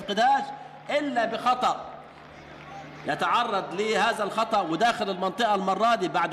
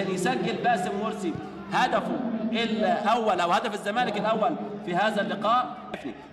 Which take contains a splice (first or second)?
second